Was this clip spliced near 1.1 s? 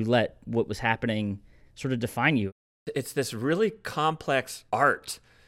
no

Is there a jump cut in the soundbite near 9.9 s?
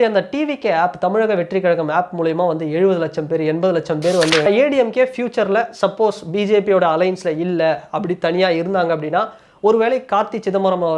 no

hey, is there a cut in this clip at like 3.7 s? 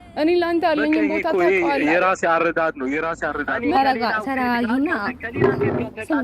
yes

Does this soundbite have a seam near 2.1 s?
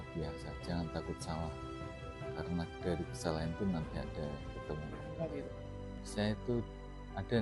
no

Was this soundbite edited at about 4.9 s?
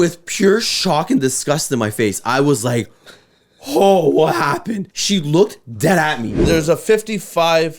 yes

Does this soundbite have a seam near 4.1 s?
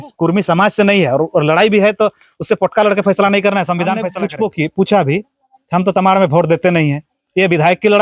yes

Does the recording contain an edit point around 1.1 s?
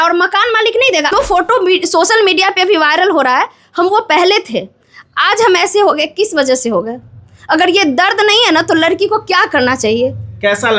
yes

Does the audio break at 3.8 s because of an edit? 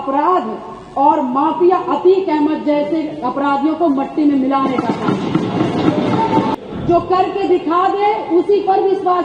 no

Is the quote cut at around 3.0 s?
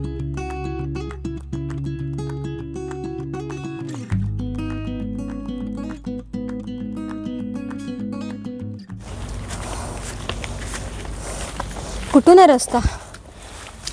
no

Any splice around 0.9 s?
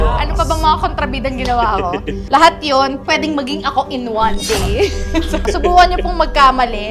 no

